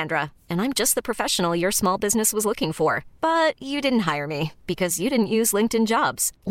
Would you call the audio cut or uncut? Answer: uncut